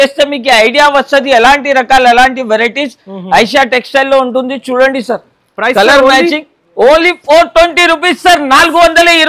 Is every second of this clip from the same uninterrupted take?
yes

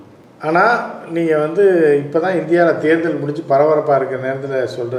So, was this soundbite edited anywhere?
no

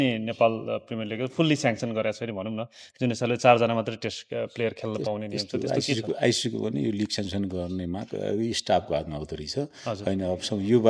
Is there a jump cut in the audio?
no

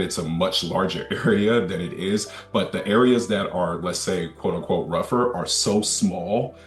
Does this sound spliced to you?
no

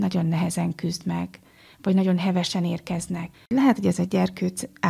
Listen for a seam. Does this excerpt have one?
yes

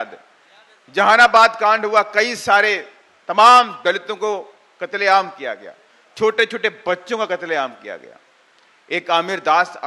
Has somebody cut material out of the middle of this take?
no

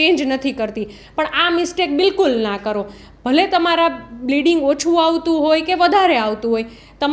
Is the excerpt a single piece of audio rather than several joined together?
yes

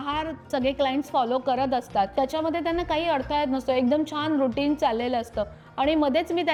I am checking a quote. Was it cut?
no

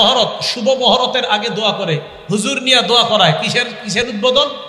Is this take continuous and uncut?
yes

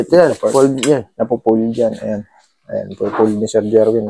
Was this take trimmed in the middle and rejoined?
no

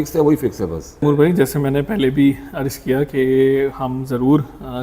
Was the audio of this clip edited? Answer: yes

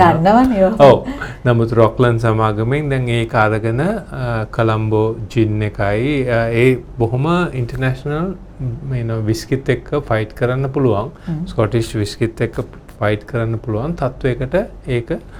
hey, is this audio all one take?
yes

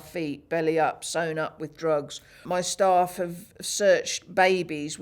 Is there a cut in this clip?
yes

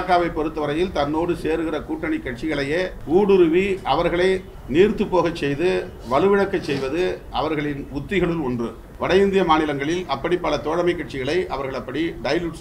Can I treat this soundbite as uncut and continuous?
no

